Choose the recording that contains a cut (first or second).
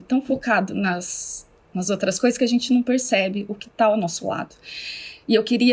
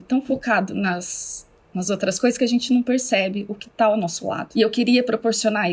second